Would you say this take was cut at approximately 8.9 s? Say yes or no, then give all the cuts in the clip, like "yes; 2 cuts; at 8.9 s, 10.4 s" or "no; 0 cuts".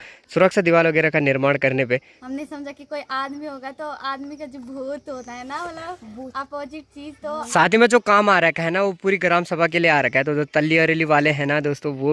no; 2 cuts; at 2.2 s, 7.4 s